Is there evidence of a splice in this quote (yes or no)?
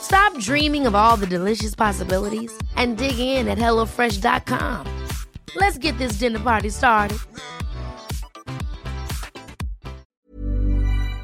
yes